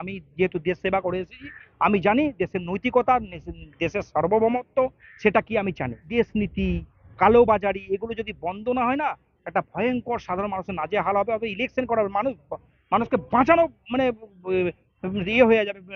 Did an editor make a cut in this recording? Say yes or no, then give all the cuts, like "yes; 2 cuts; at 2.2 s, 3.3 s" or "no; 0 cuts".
yes; 1 cut; at 6.0 s